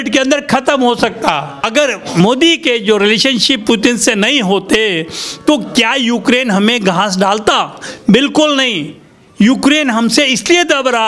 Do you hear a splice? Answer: yes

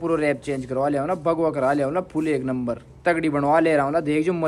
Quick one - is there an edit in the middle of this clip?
no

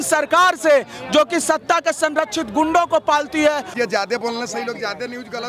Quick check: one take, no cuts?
no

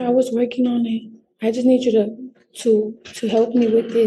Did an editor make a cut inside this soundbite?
no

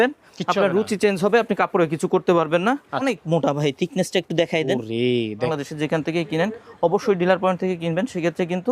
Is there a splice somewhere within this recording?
yes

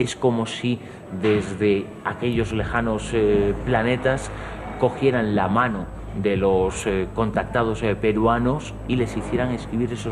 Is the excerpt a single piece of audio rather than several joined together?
yes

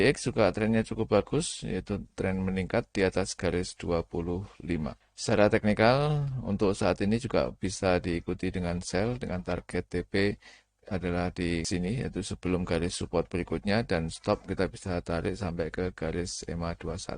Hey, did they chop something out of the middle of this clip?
yes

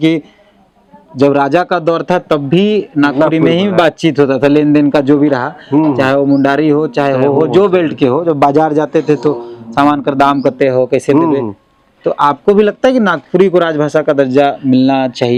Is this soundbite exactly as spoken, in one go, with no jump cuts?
yes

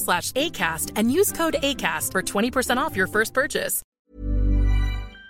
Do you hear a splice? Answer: yes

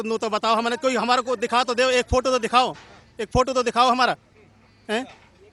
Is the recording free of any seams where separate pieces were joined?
yes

